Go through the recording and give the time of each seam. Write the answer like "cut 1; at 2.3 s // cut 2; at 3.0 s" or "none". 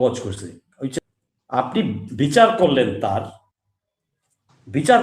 cut 1; at 1.0 s

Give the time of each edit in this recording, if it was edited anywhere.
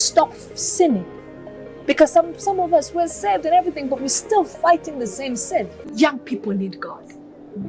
cut 1; at 5.8 s

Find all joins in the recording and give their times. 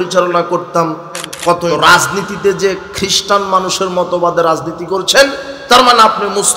cut 1; at 1.7 s

